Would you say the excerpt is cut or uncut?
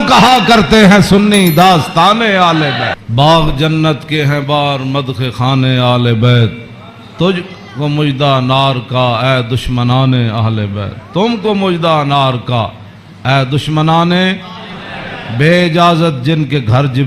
cut